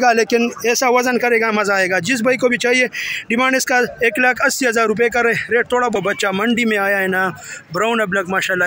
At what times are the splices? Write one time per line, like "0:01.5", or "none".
0:05.9